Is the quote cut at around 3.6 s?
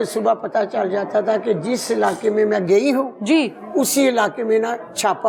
no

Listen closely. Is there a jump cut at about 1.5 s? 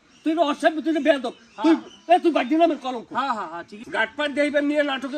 no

